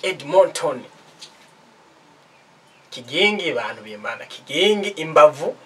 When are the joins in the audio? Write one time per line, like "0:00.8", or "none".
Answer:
none